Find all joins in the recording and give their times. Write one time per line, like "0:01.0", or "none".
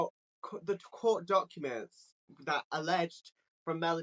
none